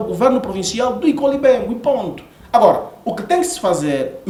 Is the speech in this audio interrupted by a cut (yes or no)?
no